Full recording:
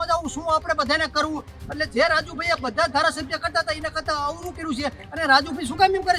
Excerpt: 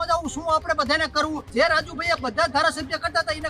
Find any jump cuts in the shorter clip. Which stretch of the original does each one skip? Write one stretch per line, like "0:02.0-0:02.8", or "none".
0:01.5-0:01.9